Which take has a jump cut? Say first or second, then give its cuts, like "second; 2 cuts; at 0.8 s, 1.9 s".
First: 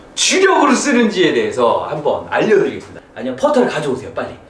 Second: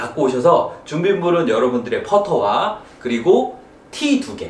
first; 1 cut; at 3.0 s